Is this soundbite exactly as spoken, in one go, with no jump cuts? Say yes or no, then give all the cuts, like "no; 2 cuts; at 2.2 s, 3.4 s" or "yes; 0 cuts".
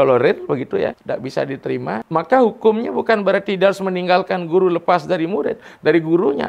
no; 2 cuts; at 1.0 s, 2.0 s